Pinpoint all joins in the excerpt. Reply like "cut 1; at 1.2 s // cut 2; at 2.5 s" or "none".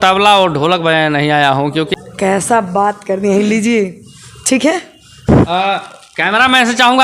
cut 1; at 1.9 s